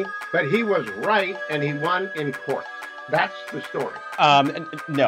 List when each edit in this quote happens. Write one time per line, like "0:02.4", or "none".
0:04.0